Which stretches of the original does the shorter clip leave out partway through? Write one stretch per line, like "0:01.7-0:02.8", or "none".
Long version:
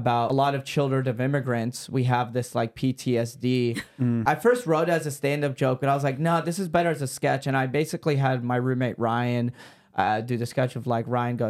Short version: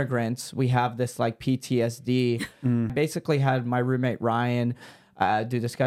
0:04.2-0:07.7